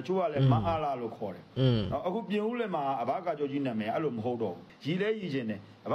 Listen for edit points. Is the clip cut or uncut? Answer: cut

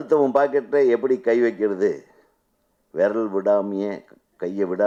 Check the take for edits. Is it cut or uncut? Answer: uncut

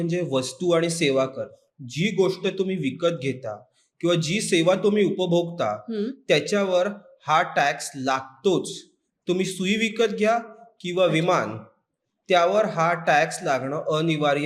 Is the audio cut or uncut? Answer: uncut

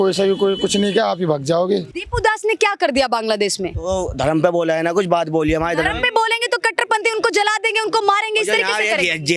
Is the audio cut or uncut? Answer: cut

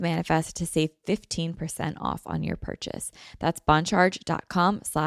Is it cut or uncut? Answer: uncut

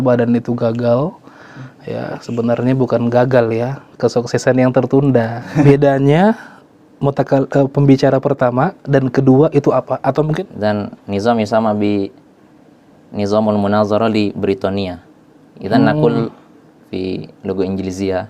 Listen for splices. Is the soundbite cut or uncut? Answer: cut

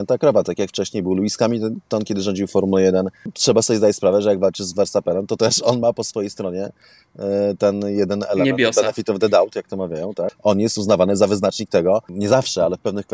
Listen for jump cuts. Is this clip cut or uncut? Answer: cut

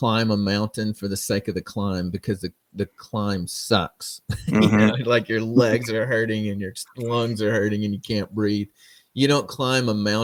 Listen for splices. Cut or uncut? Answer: uncut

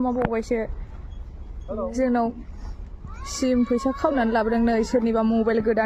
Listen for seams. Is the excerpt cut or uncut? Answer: uncut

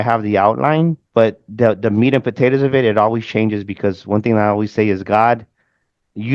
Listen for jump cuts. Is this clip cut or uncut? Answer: cut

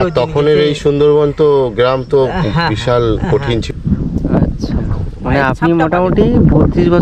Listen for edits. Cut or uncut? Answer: cut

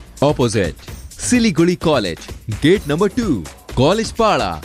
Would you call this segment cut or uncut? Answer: uncut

